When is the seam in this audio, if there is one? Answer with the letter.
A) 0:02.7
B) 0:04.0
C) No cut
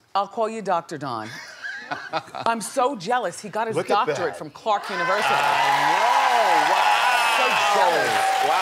C